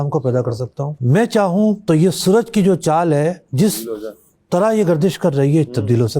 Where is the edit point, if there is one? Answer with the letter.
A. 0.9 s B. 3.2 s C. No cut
A